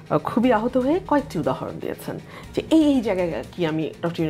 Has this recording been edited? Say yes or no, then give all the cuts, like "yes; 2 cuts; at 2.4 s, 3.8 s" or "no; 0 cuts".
no; 0 cuts